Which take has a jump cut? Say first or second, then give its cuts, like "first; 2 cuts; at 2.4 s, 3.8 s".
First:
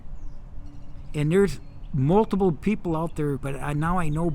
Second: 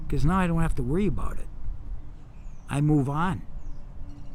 first; 1 cut; at 3.4 s